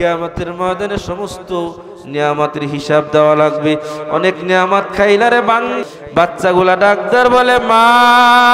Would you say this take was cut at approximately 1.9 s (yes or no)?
no